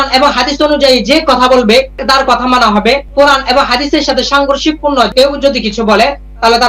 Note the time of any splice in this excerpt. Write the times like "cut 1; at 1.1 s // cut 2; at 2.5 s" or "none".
none